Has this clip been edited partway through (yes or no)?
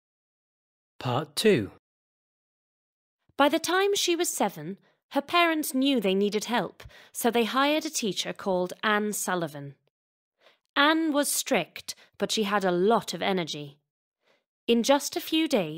yes